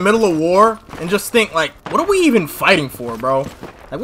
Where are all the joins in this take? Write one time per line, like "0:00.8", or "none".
none